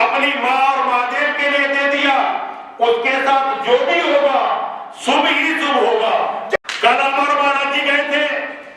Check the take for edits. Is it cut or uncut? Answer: cut